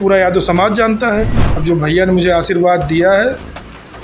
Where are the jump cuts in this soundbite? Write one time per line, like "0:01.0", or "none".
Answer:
0:01.4